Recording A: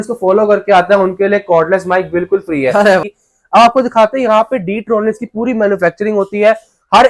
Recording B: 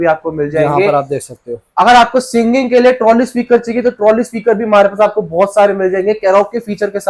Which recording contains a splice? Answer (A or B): A